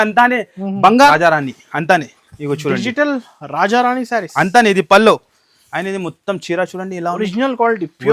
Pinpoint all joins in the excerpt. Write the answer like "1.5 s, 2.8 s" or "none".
1.1 s